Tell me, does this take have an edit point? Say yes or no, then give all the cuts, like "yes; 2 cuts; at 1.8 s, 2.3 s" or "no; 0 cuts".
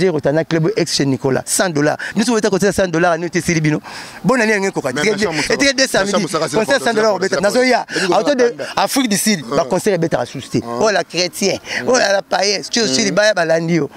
no; 0 cuts